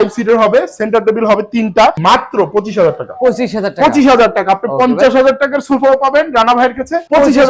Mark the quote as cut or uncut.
uncut